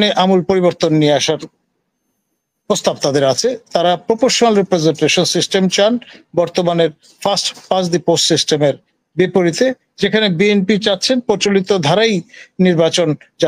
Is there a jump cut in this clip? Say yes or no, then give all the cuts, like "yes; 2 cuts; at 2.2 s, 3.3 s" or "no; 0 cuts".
no; 0 cuts